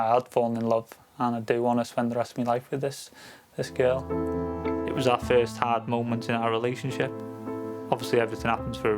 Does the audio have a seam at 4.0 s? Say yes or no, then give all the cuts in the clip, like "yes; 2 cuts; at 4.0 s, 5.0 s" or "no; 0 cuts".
yes; 1 cut; at 4.0 s